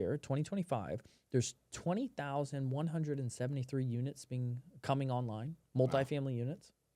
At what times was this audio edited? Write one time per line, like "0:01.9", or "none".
none